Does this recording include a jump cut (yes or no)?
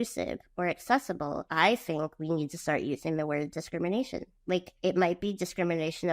yes